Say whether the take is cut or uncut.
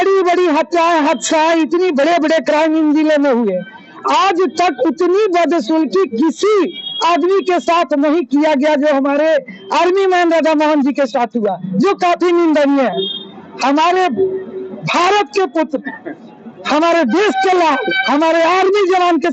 uncut